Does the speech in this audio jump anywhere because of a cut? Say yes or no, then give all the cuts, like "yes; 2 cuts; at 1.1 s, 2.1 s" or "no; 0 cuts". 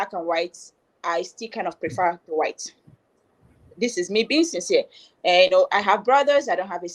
no; 0 cuts